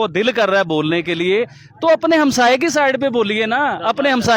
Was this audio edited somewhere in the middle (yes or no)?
no